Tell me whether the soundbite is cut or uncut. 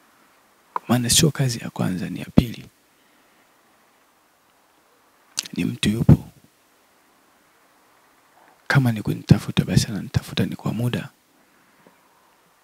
uncut